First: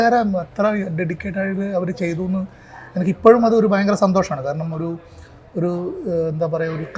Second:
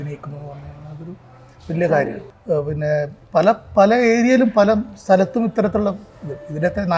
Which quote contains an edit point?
second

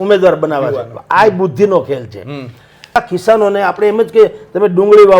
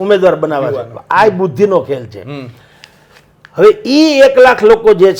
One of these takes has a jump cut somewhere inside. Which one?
first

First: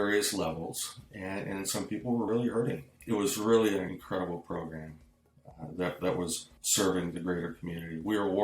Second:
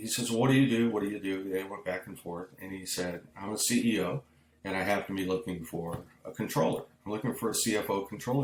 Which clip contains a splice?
first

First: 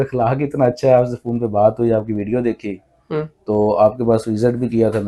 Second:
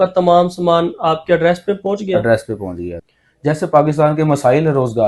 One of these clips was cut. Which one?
second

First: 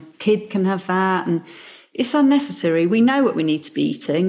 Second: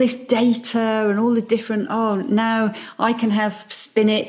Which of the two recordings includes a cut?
first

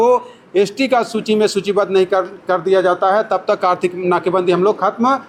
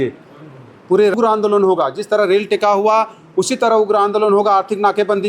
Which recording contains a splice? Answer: second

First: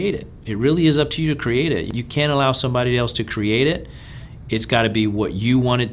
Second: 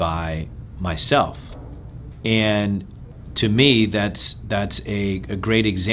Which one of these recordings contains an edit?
first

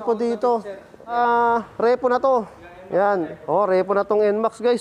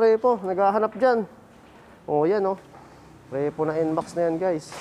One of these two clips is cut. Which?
first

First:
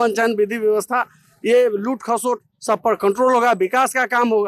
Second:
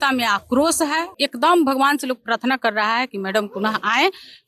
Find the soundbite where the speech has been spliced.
second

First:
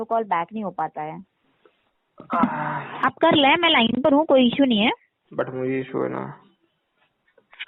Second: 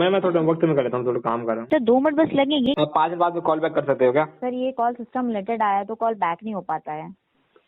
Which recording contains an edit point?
second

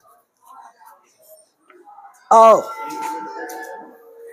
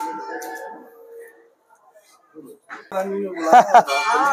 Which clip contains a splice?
second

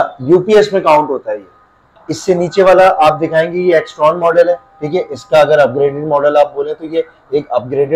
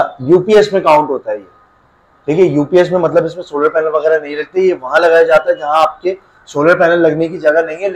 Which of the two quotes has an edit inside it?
first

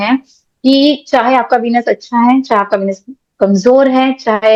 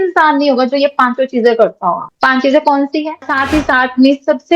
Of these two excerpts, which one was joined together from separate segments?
second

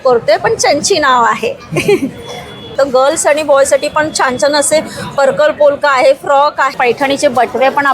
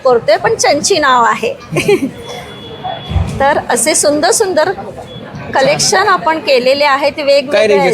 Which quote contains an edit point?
first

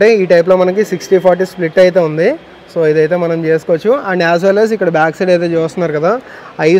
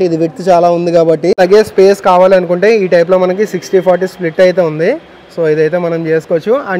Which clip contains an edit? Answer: second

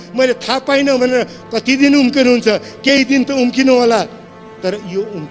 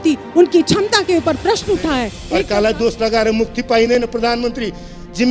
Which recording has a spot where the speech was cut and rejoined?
second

